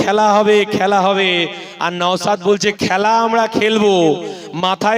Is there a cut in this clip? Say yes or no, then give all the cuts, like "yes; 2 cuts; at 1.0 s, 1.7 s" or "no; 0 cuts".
no; 0 cuts